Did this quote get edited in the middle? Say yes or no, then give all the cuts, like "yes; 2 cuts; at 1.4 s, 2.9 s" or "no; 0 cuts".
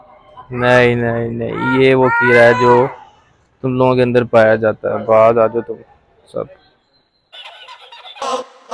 no; 0 cuts